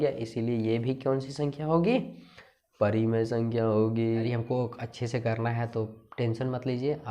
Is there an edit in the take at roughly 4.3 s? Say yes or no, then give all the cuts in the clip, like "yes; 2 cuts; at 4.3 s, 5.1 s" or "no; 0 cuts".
yes; 1 cut; at 4.3 s